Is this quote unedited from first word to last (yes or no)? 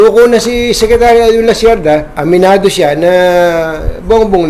no